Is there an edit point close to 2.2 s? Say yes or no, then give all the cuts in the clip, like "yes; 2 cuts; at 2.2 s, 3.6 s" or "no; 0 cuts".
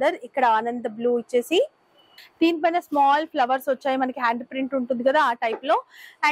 yes; 1 cut; at 2.2 s